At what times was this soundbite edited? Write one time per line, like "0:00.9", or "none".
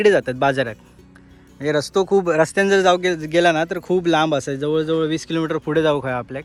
none